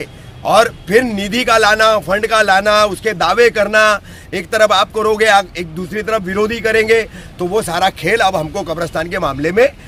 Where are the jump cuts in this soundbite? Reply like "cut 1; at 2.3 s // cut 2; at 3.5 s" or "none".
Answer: none